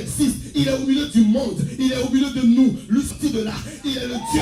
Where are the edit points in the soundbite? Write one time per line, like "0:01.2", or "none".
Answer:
0:03.1